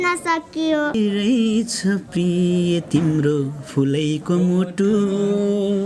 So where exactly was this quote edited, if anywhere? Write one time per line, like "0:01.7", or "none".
0:01.0